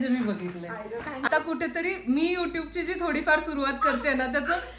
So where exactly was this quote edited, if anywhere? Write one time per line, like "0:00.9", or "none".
0:01.2